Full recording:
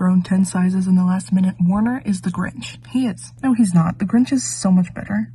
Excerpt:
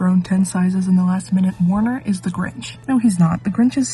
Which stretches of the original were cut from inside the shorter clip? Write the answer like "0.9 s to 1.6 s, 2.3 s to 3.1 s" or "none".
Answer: 2.7 s to 3.3 s